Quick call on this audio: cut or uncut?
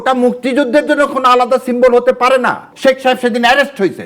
cut